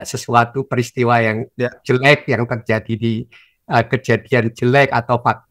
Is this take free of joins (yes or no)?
yes